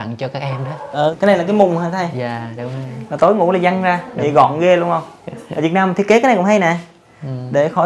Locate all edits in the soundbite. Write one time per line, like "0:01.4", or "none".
0:01.0